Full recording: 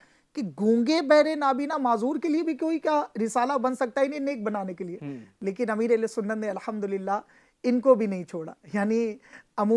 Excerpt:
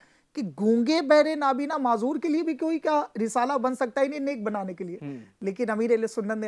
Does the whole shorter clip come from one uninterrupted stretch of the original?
yes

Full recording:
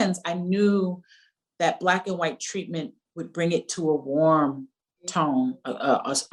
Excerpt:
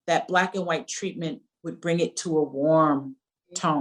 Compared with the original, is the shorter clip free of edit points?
yes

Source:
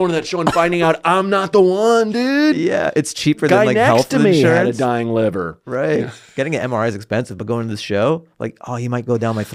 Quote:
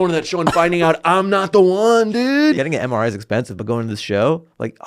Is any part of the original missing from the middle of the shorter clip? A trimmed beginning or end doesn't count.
yes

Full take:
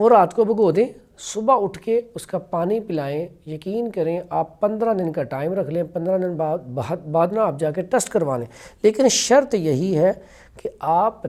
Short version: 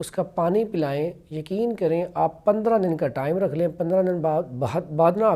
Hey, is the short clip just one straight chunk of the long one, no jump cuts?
yes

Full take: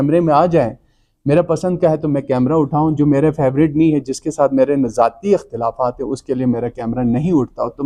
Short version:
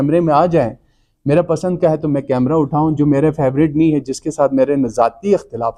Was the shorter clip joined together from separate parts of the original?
no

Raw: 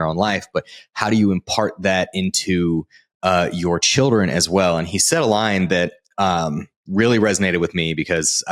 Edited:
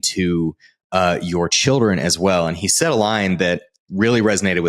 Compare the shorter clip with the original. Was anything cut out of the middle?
yes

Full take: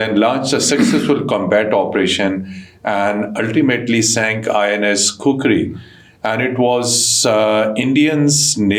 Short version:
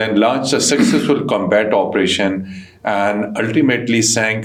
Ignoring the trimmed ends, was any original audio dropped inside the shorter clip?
no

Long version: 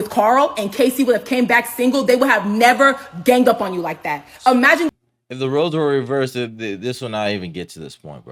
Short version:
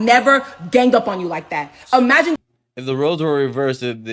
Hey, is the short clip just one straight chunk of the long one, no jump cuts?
yes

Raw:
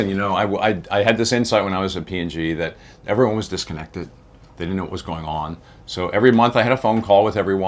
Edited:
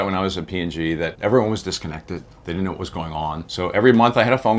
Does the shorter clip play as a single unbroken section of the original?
no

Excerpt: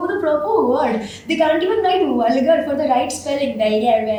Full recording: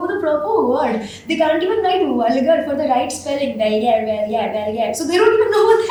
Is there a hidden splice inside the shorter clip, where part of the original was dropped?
no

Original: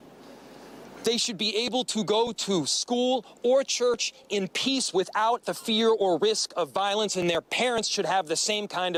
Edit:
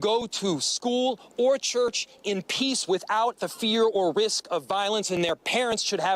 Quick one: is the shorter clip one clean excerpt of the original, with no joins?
yes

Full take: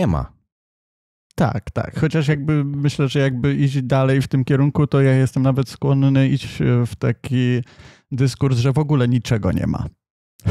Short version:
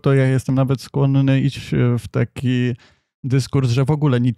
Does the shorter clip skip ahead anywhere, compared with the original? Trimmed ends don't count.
no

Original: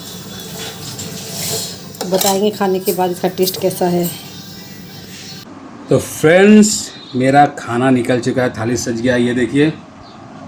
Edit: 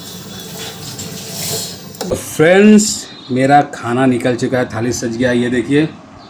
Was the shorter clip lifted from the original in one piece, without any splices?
no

